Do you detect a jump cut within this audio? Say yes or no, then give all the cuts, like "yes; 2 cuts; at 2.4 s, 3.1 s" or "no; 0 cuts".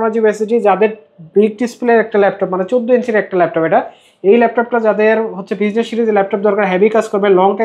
no; 0 cuts